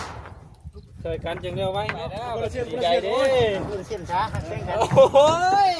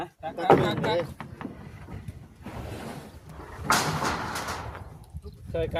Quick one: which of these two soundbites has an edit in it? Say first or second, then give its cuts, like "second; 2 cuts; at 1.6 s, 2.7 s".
first; 1 cut; at 2.3 s